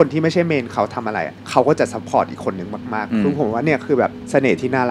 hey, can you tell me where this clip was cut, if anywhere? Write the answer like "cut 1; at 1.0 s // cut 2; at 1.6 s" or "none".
cut 1; at 3.0 s